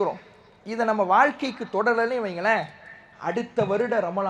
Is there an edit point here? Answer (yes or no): no